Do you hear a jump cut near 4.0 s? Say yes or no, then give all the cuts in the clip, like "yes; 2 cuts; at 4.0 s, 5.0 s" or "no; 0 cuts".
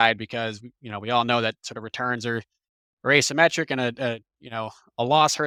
no; 0 cuts